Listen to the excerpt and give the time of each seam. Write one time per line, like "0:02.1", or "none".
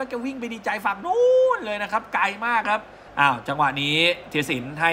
0:03.0